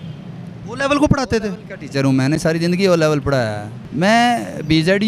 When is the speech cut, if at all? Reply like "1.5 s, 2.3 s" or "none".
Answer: 3.9 s